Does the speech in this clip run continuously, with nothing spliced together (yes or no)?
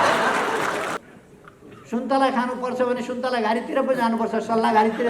no